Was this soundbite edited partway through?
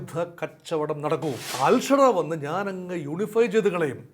yes; 1 cut; at 1.4 s

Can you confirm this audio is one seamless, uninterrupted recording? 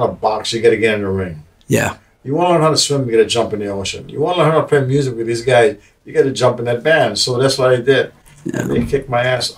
yes; 0 cuts

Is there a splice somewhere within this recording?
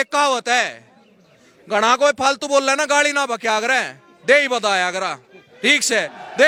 no; 0 cuts

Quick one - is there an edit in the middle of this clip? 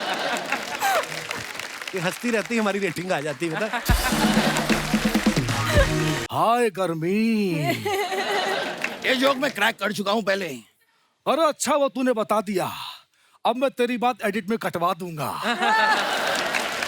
yes; 1 cut; at 6.2 s

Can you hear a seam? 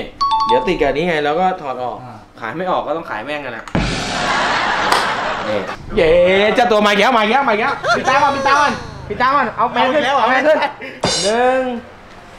yes; 1 cut; at 5.8 s

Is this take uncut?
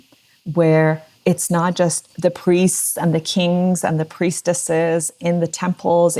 no; 2 cuts; at 1.1 s, 2.1 s

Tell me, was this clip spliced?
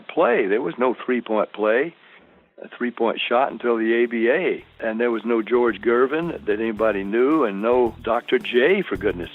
yes; 2 cuts; at 4.8 s, 8.0 s

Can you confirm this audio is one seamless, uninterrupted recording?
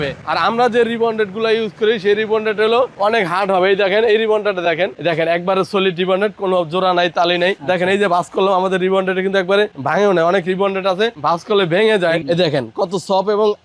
no; 2 cuts; at 5.0 s, 12.2 s

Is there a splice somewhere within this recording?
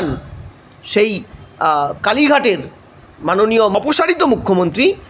yes; 1 cut; at 3.7 s

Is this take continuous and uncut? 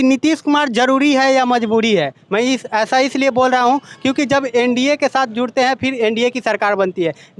yes; 0 cuts

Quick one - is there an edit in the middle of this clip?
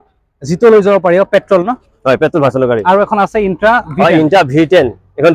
no; 0 cuts

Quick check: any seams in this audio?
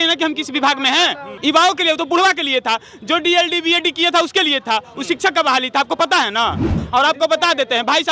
yes; 2 cuts; at 1.3 s, 6.7 s

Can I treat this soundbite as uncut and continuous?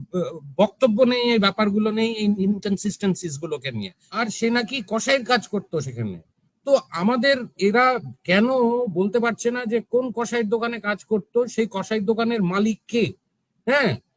no; 1 cut; at 4.0 s

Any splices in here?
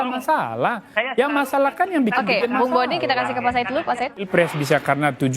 yes; 1 cut; at 4.3 s

